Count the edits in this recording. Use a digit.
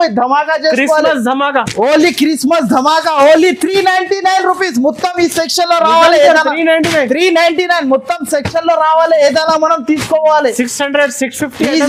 0